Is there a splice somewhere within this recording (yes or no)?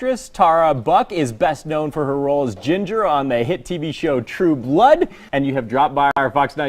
yes